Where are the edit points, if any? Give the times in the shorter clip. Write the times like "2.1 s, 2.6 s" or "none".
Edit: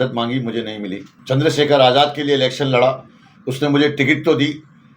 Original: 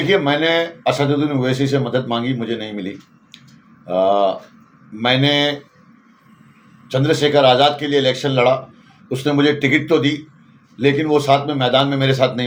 1.1 s

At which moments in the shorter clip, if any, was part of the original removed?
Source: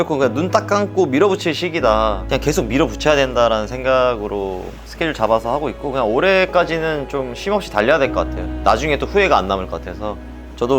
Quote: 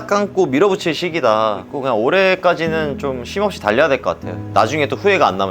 1.6 s

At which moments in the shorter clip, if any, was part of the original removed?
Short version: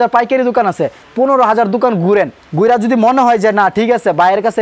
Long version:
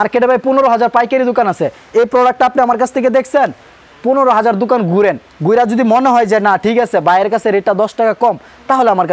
0.9 s

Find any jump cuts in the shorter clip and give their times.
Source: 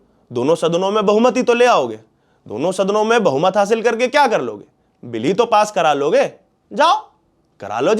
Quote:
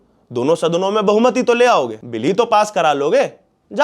2.0 s

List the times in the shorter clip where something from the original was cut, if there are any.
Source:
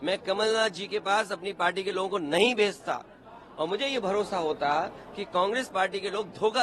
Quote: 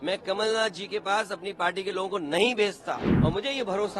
3.1 s

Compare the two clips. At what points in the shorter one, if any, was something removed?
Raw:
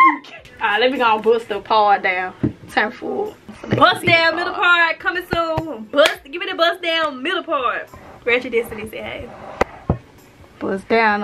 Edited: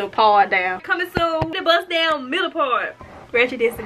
1.2 s

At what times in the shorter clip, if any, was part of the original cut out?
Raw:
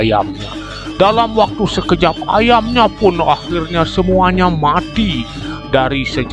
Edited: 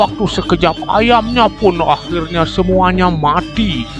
none

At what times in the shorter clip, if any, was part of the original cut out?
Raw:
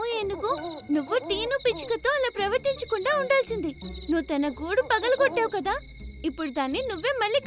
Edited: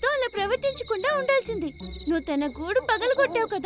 none

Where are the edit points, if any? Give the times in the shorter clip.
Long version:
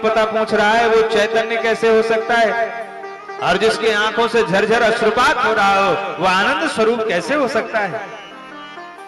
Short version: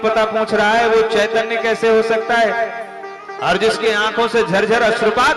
none

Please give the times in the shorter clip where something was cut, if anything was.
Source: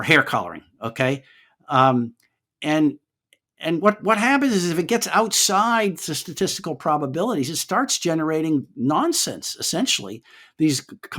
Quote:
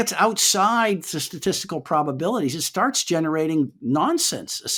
none

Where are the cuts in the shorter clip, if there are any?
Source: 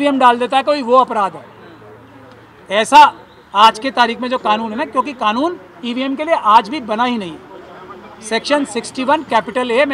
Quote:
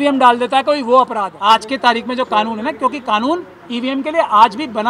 1.3 s

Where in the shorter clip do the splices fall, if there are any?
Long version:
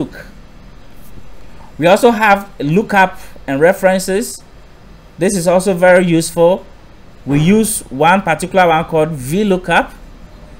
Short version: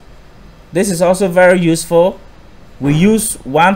none

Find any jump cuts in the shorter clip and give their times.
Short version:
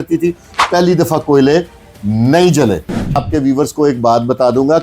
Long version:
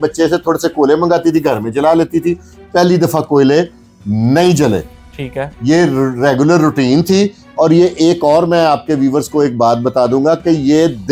3.2 s

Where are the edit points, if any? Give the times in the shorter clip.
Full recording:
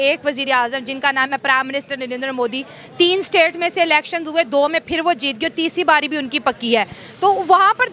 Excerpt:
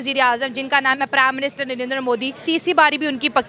2.4 s

